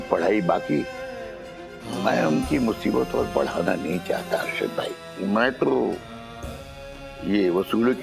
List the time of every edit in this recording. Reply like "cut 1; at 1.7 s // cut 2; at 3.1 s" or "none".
cut 1; at 1.9 s // cut 2; at 5.0 s